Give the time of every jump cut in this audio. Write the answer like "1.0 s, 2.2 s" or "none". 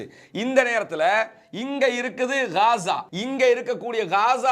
3.1 s